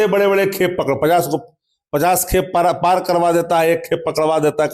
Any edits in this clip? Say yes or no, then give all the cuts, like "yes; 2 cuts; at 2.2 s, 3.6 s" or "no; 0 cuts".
no; 0 cuts